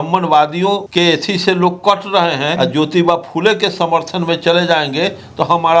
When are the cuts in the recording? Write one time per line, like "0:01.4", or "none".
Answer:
0:00.9
0:02.5